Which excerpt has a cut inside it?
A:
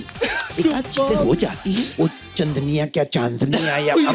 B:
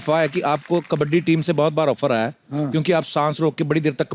A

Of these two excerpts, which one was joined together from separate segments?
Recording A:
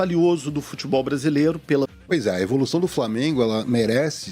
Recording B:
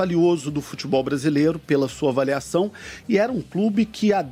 A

